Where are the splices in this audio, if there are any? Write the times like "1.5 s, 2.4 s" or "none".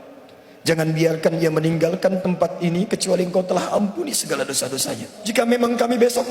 5.1 s